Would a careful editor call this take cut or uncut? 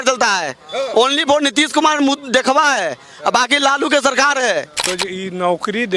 cut